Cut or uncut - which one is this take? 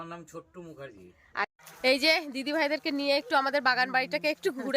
cut